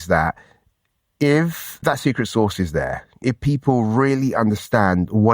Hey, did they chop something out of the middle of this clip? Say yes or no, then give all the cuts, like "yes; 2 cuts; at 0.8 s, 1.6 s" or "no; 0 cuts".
yes; 2 cuts; at 1.8 s, 3.2 s